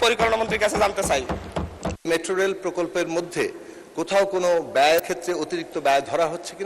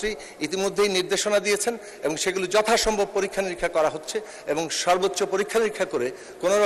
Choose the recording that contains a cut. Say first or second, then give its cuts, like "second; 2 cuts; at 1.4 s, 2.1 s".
first; 1 cut; at 2.0 s